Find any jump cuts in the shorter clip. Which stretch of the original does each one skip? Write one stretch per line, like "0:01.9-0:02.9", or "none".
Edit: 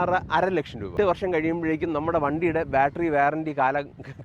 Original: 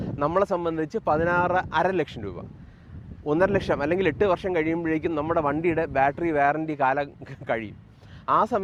0:02.4-0:04.2